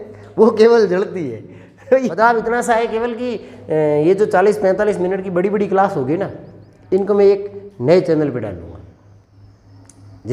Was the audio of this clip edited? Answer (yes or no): yes